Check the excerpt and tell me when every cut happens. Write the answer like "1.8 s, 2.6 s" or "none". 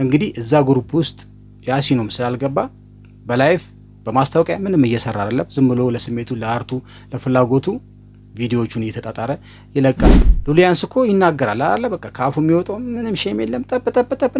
10.1 s